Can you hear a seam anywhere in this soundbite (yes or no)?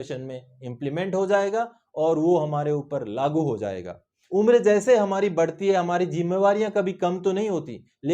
yes